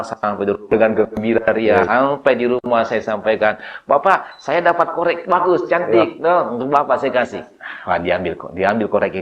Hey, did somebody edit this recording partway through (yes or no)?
no